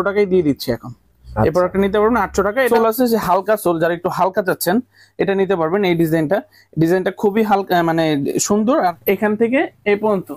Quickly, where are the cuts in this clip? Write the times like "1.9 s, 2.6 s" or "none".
2.7 s, 9.0 s